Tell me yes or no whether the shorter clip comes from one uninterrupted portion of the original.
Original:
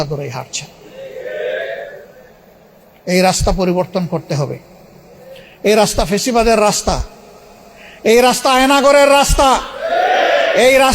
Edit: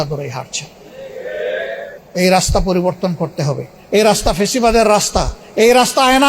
no